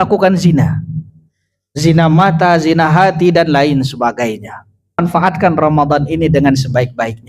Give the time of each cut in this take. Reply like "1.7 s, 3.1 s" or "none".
5.0 s